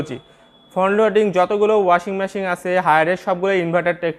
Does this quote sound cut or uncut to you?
uncut